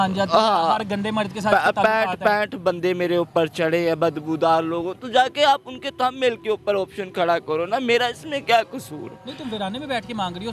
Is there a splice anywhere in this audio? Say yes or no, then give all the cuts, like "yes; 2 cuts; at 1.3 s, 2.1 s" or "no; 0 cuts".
no; 0 cuts